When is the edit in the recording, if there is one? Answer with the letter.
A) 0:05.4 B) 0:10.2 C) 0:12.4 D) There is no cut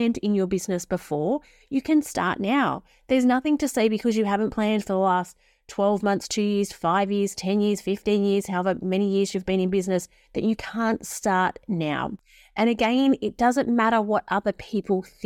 D